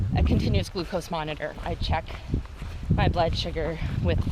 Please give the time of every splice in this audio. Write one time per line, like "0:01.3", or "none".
0:01.6